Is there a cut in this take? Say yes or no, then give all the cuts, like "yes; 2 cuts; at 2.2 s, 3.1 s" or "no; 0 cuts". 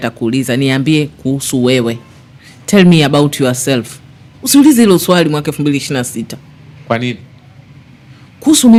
no; 0 cuts